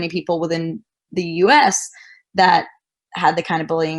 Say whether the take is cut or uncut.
cut